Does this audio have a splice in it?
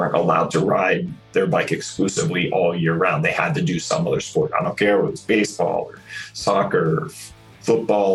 no; 0 cuts

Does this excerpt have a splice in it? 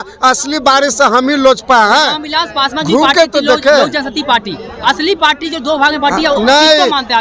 no; 0 cuts

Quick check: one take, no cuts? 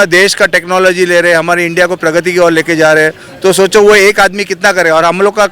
yes; 0 cuts

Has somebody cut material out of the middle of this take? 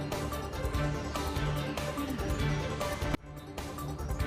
no; 0 cuts

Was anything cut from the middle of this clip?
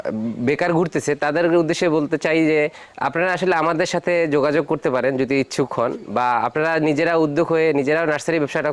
no; 0 cuts

